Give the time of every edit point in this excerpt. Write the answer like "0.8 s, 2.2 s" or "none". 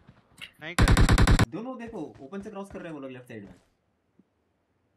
1.4 s